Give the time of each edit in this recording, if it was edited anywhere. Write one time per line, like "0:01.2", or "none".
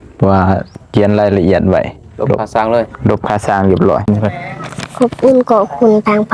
0:04.1